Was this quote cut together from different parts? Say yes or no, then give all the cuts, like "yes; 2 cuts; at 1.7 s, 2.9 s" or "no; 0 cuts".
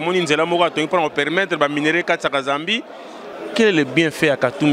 yes; 1 cut; at 3.2 s